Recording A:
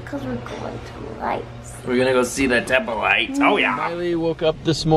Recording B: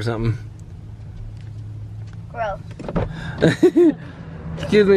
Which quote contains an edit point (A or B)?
A